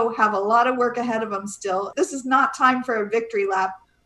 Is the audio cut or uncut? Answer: cut